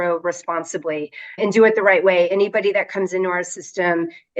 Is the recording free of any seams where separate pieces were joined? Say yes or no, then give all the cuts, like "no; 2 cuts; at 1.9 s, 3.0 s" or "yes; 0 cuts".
no; 1 cut; at 1.4 s